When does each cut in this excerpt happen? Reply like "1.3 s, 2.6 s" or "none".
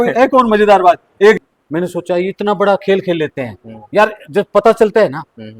1.4 s